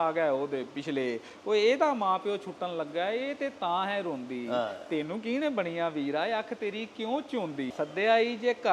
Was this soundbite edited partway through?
yes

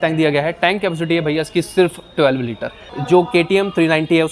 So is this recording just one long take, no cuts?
no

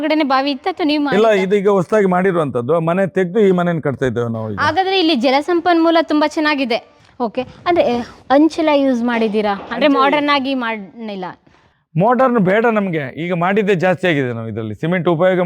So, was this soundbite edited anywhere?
yes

